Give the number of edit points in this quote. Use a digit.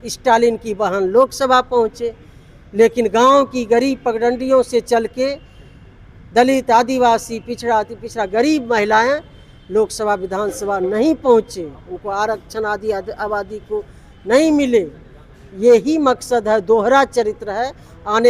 0